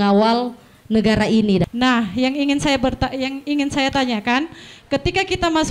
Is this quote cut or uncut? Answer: cut